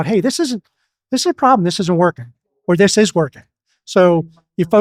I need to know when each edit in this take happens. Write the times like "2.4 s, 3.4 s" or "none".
none